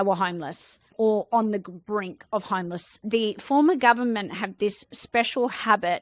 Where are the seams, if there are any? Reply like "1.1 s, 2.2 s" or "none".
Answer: 3.0 s